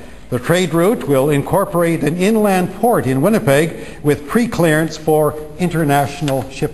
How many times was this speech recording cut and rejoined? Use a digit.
0